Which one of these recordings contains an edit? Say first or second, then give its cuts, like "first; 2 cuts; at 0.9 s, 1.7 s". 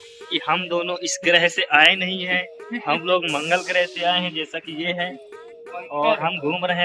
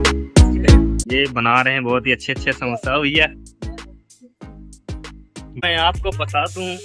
second; 2 cuts; at 1.0 s, 5.6 s